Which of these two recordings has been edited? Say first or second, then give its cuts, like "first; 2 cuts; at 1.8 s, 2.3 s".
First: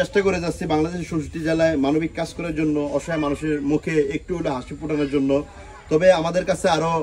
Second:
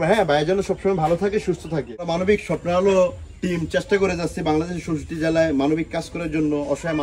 second; 1 cut; at 2.1 s